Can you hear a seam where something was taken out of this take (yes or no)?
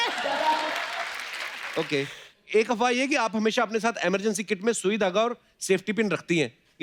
yes